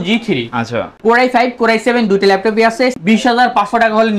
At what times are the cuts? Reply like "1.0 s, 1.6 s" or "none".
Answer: 3.0 s